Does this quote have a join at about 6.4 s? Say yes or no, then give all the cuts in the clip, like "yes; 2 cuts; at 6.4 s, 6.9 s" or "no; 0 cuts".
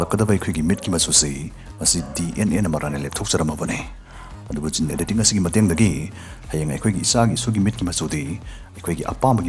no; 0 cuts